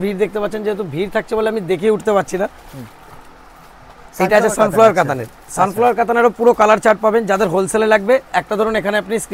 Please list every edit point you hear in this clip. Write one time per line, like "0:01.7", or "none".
none